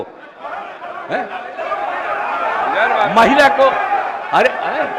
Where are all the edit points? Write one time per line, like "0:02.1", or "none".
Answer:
none